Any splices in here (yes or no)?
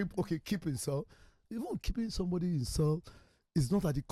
no